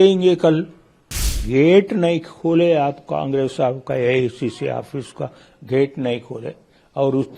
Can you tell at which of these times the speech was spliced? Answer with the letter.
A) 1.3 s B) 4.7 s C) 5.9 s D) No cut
A